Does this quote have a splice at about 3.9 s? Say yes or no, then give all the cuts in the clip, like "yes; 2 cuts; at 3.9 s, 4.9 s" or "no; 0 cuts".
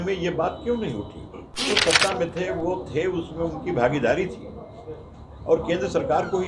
no; 1 cut; at 1.7 s